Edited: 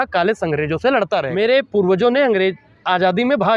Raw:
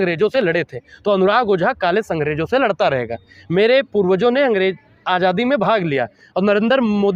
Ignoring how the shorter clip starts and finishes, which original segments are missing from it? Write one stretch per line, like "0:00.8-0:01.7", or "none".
0:03.0-0:03.5